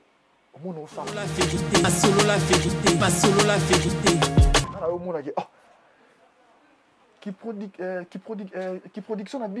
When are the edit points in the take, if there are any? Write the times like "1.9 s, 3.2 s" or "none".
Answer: 1.2 s, 4.8 s